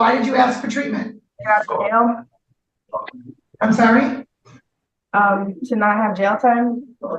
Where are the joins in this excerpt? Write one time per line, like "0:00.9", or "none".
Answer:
0:01.3